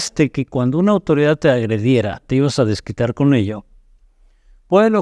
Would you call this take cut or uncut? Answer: uncut